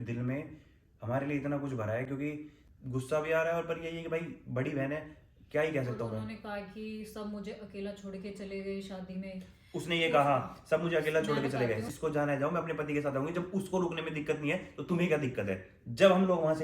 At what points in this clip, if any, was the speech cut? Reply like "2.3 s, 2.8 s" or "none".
2.5 s, 11.8 s